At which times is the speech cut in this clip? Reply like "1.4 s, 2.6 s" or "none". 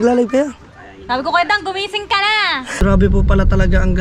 2.8 s